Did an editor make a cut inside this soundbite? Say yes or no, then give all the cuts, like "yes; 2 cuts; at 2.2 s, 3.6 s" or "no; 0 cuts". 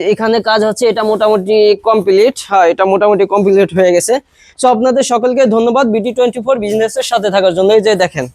no; 0 cuts